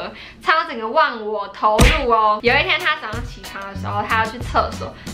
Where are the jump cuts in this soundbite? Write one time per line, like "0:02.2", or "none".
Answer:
0:02.4